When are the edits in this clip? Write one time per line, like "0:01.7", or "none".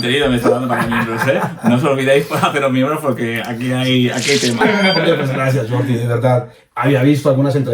0:04.6
0:06.6